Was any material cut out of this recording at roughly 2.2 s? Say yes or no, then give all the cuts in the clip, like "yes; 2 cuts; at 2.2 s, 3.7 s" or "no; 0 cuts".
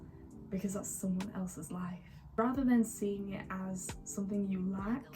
yes; 1 cut; at 2.2 s